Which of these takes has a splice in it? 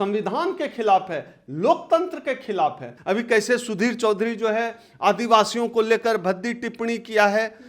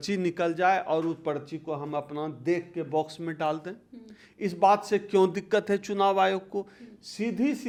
first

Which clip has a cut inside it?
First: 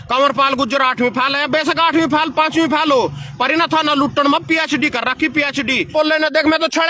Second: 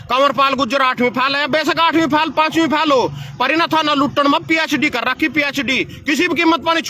first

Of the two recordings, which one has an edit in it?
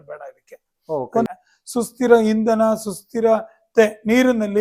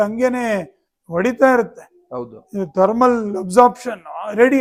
first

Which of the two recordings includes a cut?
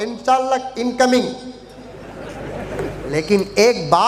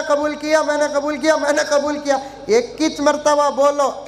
first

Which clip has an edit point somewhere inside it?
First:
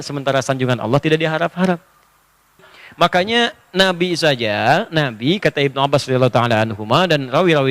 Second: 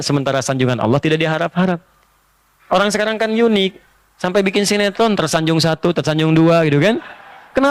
first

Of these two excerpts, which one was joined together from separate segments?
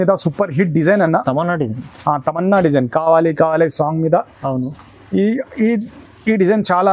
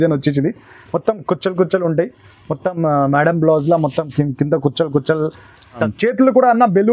second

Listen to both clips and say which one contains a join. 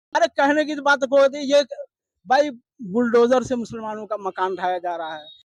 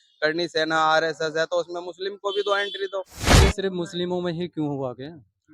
second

